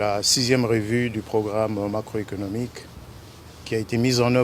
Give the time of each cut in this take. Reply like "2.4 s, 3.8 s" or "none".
none

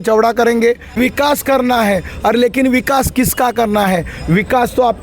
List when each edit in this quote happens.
0.9 s

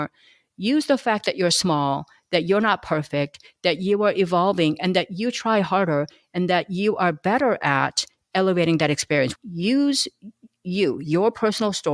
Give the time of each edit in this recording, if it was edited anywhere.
9.4 s

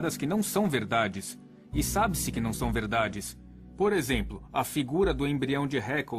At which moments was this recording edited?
3.9 s

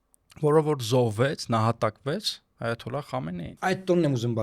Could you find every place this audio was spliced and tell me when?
3.5 s

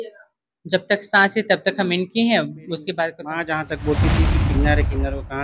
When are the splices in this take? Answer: 3.1 s

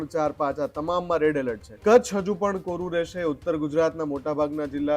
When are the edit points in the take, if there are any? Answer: 1.7 s

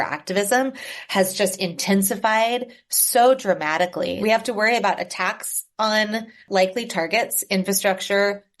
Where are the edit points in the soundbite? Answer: 4.2 s

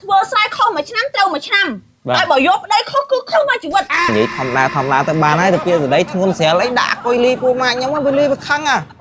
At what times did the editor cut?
4.1 s

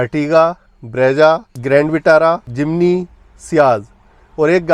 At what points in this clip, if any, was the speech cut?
none

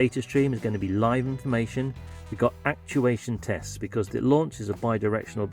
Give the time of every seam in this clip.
none

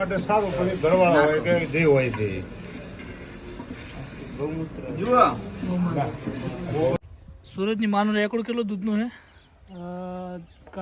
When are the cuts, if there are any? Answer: 7.0 s

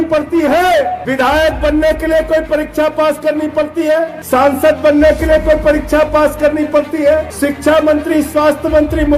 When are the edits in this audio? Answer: 1.0 s, 4.2 s, 7.3 s

